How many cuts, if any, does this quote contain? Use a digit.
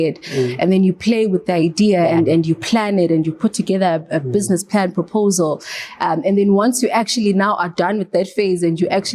1